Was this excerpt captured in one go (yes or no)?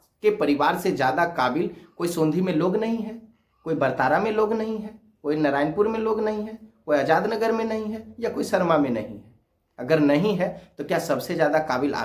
yes